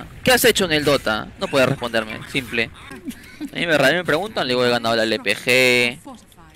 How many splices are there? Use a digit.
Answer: 0